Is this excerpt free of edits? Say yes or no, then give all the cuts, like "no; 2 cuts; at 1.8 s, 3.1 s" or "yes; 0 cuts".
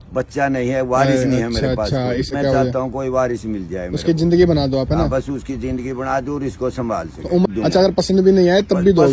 no; 2 cuts; at 2.3 s, 7.5 s